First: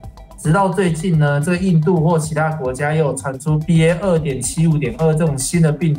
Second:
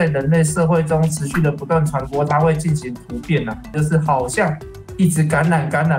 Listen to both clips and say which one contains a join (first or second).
second